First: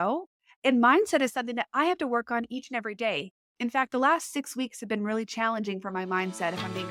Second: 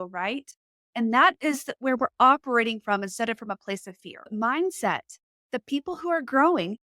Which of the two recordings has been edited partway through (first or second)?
second